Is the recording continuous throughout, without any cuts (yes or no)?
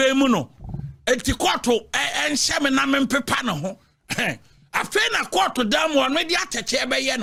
yes